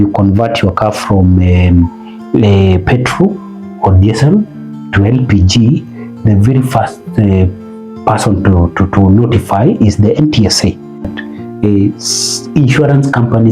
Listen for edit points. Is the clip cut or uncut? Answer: cut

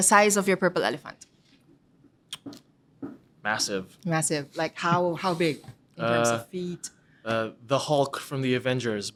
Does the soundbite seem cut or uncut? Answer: uncut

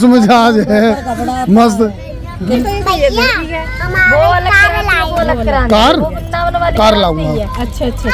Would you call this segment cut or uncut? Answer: uncut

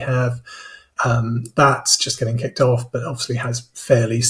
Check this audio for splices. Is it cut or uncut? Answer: uncut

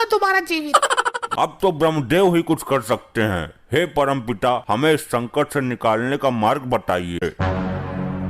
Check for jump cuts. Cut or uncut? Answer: cut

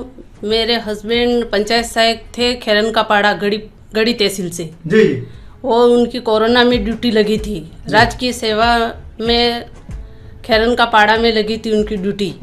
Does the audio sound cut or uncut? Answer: uncut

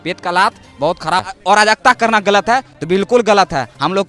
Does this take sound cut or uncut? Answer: cut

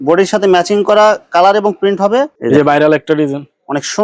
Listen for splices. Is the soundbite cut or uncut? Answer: cut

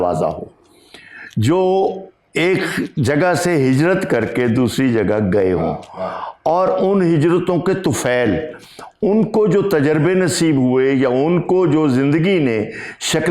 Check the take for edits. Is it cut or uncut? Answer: uncut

